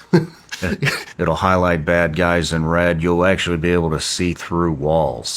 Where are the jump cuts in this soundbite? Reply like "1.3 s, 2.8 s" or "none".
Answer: 1.0 s